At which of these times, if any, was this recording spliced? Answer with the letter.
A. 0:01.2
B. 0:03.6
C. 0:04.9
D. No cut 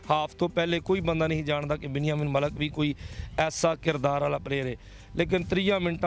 D